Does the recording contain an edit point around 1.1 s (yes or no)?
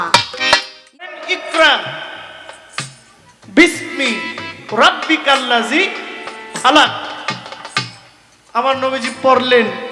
yes